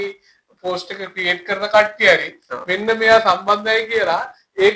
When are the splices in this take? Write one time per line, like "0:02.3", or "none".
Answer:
none